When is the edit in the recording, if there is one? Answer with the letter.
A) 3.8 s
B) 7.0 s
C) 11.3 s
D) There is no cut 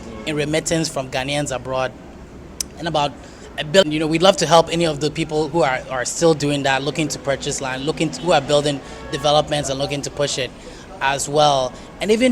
A